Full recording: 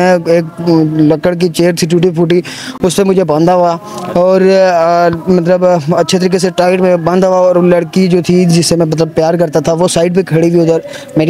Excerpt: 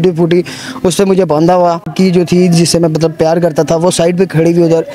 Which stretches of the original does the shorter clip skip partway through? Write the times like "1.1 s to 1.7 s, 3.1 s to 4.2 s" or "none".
3.9 s to 7.9 s